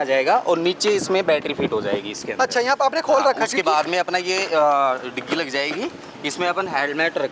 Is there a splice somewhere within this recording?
no; 0 cuts

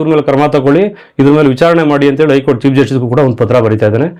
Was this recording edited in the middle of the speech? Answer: no; 0 cuts

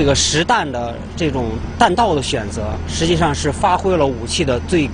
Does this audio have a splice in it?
no; 0 cuts

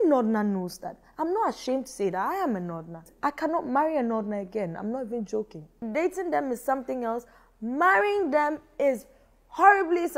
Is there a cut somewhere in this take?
yes; 2 cuts; at 3.0 s, 5.8 s

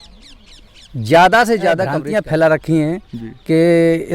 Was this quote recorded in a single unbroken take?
no; 1 cut; at 2.0 s

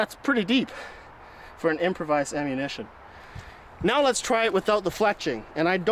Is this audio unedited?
yes; 0 cuts

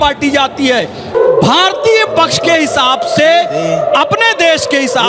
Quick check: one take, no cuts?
no; 1 cut; at 1.1 s

